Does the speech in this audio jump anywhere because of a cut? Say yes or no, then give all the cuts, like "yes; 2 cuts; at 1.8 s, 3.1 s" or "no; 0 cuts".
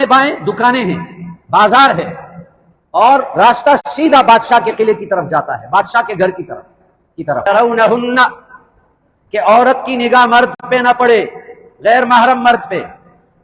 yes; 1 cut; at 7.5 s